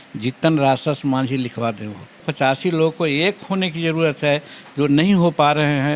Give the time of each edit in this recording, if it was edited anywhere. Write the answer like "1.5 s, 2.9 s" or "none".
2.3 s